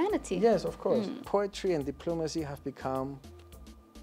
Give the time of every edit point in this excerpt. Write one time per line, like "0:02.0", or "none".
0:01.2